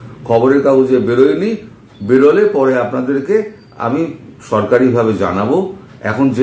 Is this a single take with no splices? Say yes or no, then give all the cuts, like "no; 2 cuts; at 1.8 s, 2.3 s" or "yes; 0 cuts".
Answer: yes; 0 cuts